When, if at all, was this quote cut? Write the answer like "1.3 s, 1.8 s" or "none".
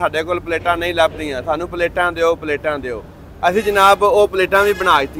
none